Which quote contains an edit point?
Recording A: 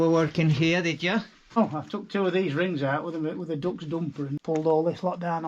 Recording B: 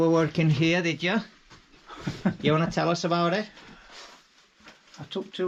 A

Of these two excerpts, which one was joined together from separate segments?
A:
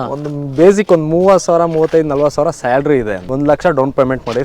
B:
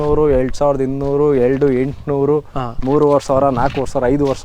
A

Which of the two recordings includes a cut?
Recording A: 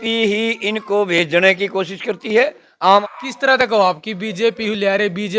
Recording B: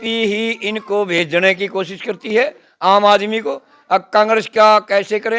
A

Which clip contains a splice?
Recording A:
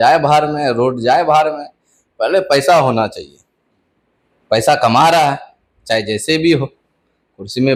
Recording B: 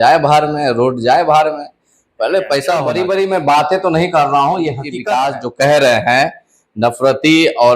B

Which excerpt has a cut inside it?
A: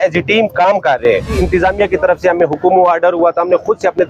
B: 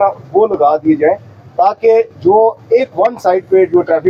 A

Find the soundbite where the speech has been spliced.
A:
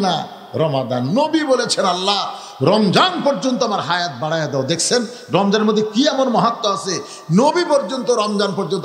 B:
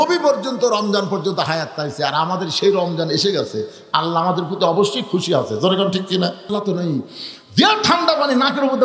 B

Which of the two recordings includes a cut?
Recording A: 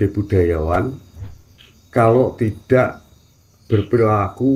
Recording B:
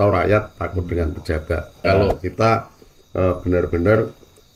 B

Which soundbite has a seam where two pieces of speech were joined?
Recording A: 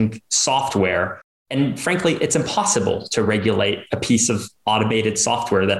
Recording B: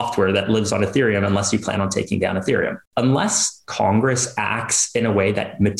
B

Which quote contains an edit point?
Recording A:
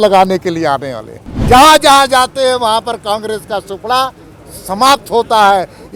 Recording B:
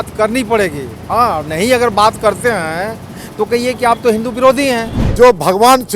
B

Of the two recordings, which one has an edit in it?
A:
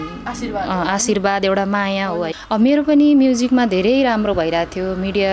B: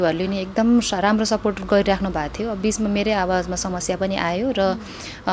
A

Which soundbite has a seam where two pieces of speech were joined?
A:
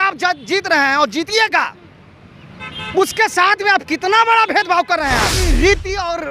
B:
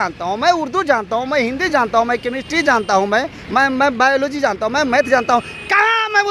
A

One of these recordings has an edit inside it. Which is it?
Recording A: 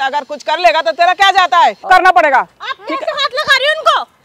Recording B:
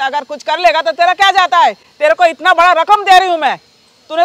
A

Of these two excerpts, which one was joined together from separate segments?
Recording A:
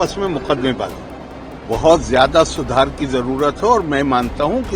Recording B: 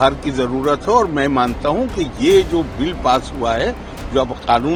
A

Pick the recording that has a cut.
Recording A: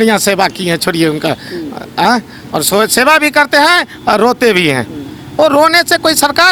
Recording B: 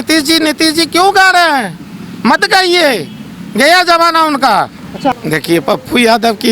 B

